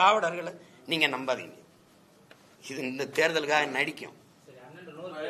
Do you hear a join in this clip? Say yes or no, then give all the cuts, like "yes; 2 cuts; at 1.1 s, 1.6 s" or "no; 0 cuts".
no; 0 cuts